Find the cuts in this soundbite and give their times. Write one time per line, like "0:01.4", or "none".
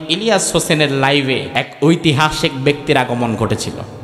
0:01.5